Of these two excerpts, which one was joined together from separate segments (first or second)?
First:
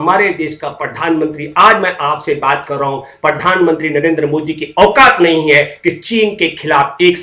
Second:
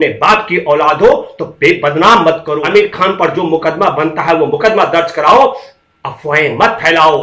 second